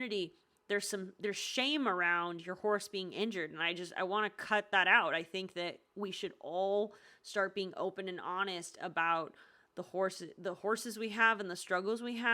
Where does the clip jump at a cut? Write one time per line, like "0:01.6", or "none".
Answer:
none